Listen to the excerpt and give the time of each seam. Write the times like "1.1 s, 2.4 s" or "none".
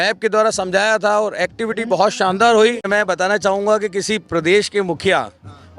2.9 s

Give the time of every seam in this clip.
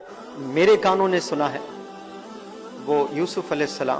none

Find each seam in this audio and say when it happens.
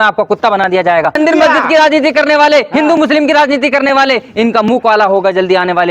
1.2 s

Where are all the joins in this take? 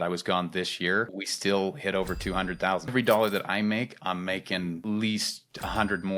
1.2 s, 2.9 s

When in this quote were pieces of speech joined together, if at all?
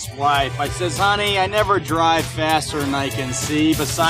none

